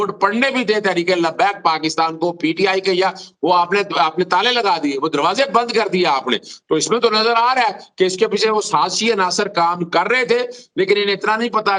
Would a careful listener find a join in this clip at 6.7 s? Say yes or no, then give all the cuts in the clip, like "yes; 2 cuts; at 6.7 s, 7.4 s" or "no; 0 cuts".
no; 0 cuts